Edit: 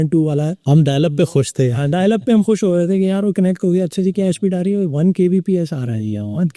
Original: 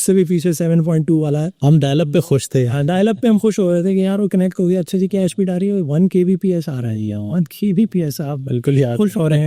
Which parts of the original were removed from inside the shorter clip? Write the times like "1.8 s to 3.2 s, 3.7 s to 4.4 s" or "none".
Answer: none